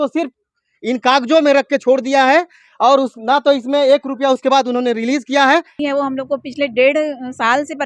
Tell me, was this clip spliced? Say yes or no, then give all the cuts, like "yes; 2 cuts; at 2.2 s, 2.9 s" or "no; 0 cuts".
yes; 1 cut; at 5.8 s